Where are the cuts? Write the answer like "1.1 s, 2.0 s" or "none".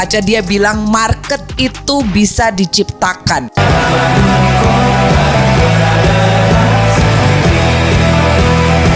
none